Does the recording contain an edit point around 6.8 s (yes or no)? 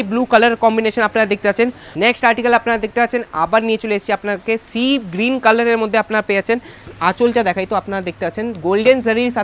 yes